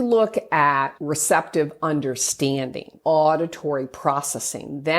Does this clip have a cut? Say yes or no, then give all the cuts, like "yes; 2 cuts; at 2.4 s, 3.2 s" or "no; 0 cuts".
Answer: yes; 2 cuts; at 1.0 s, 2.9 s